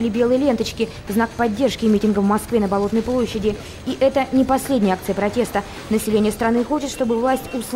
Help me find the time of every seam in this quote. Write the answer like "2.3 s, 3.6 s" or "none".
none